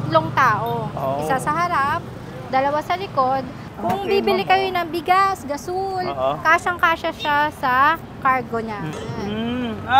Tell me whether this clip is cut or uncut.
cut